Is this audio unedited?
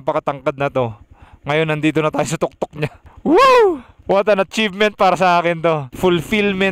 no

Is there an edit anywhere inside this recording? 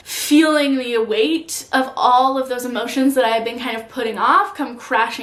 no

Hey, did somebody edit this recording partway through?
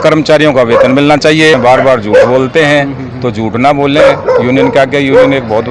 yes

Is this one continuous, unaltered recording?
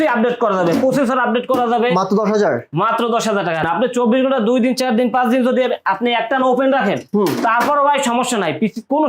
no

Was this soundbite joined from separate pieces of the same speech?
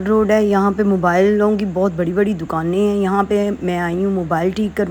no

